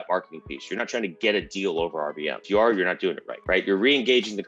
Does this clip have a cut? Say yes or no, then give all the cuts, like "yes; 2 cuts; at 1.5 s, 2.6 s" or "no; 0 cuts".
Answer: yes; 2 cuts; at 2.4 s, 3.3 s